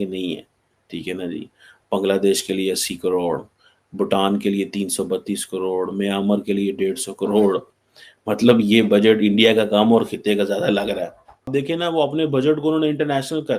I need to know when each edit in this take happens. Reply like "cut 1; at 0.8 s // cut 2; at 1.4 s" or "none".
cut 1; at 11.5 s